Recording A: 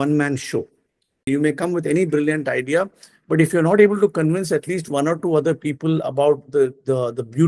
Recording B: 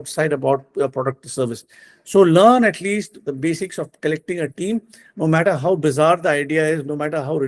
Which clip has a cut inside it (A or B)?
A